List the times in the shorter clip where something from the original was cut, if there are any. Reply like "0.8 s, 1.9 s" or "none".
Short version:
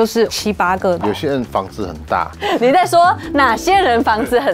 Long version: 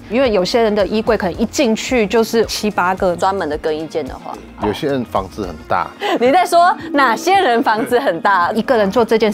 1.0 s